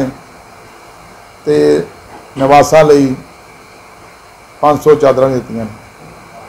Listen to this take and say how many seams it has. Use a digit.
0